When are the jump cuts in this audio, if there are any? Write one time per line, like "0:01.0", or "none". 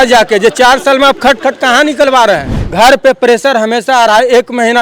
0:02.6